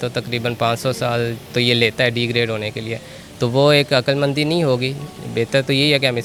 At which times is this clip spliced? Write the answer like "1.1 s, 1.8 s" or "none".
none